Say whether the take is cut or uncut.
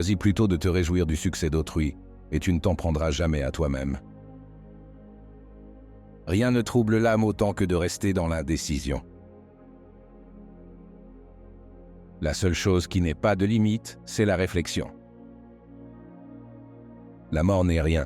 cut